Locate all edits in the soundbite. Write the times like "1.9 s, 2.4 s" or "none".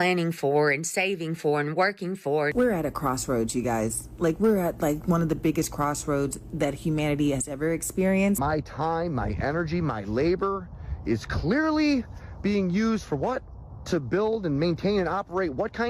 2.5 s, 8.4 s